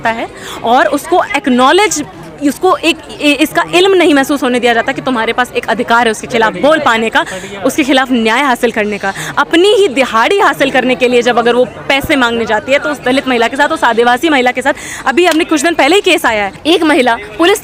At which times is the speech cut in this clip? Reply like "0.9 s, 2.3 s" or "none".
none